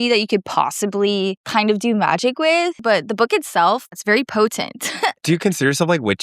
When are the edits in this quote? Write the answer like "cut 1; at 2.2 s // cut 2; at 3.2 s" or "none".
cut 1; at 1.4 s // cut 2; at 2.8 s // cut 3; at 4.0 s // cut 4; at 5.2 s